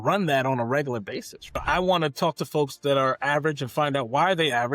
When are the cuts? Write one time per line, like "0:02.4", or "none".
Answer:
0:01.6

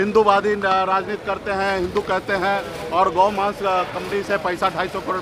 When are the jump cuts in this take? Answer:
none

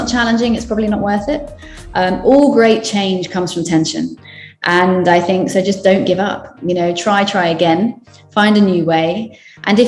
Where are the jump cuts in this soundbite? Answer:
none

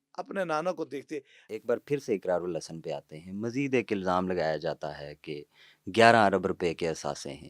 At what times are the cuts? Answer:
0:01.4

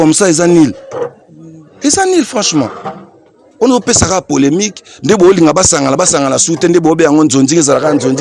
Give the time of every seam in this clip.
none

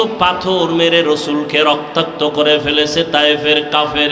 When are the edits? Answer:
none

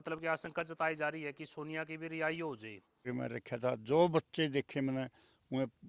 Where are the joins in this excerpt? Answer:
0:03.0

